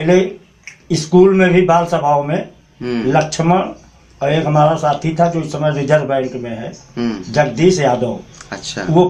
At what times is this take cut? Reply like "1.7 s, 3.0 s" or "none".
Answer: none

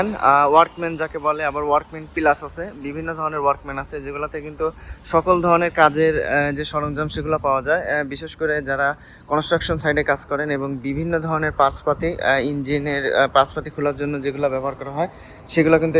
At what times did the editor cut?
none

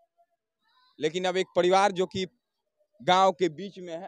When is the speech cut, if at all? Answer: none

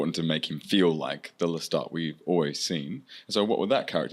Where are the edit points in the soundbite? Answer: none

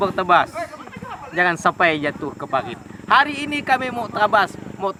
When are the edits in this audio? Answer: none

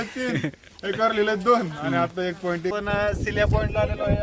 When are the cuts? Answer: 2.7 s

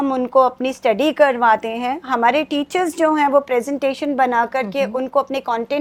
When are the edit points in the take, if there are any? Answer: none

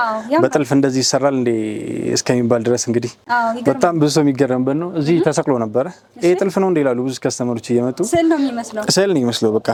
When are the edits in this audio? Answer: none

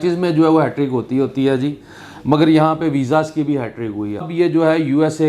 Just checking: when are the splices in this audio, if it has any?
4.3 s

